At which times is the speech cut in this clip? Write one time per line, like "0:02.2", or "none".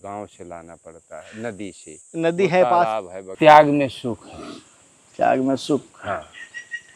0:03.2